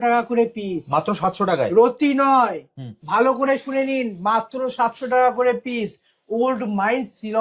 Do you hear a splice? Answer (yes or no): no